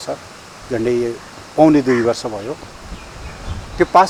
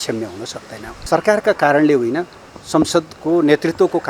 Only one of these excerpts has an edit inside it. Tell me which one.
second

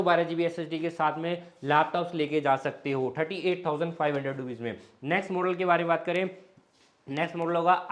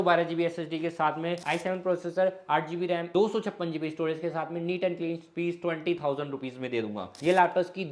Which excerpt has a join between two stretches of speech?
second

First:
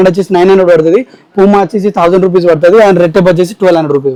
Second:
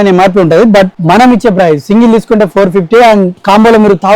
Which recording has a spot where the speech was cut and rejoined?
second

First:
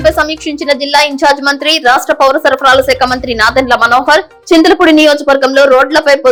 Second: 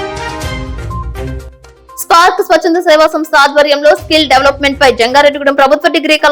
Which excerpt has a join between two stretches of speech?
second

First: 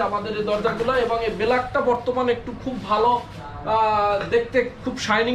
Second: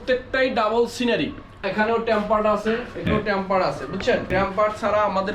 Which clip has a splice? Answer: second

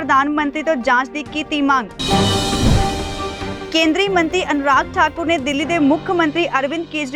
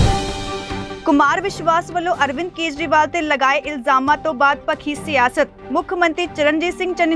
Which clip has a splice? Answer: second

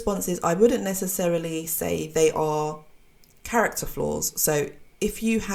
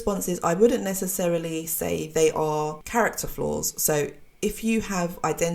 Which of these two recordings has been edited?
second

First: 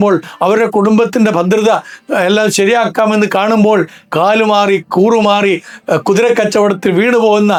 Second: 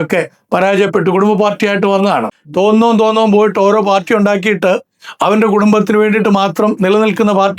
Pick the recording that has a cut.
second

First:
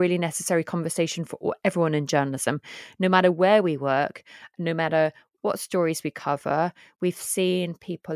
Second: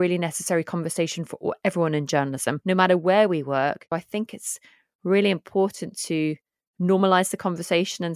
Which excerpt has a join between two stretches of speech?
second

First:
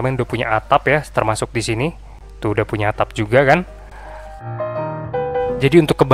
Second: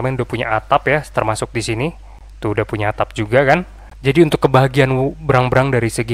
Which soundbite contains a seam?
second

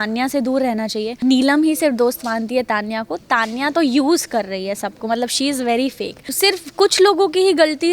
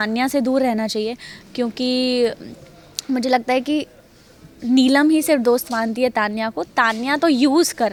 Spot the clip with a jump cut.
first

